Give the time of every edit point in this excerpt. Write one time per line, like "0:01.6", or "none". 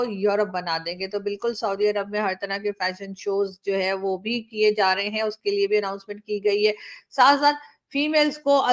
none